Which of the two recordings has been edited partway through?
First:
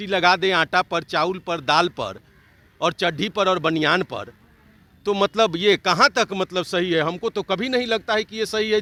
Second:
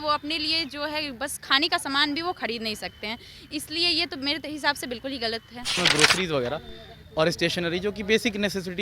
second; 1 cut; at 5.8 s

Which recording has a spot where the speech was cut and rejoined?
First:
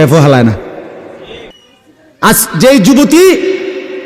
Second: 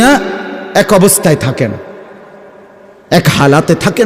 first; 1 cut; at 1.6 s

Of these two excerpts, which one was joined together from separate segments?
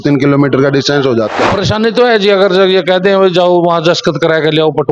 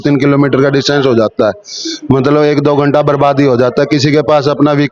first; 1 cut; at 1.4 s

